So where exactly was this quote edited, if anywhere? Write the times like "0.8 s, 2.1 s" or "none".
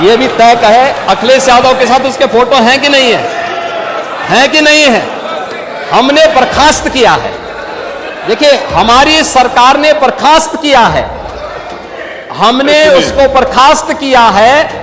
none